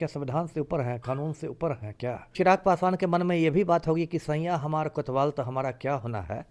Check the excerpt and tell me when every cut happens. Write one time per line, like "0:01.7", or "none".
0:02.3

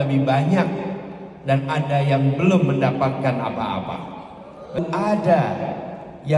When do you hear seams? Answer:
0:04.8

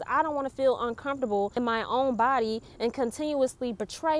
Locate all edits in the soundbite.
0:01.5

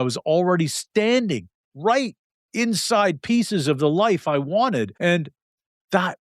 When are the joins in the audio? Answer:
0:04.9

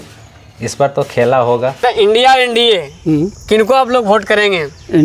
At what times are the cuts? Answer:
0:01.8

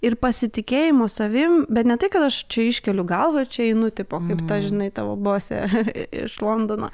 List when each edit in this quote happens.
none

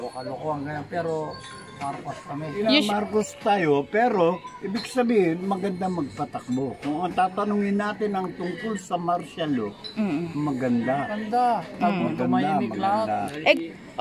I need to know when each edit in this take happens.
0:02.5

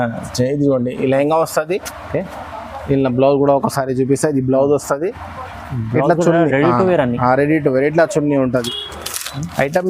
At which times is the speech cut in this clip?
0:08.5

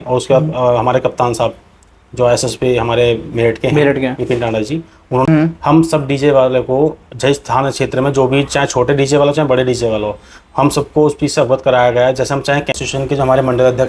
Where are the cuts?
0:05.3
0:12.7

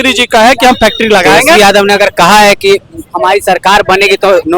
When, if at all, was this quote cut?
0:01.6

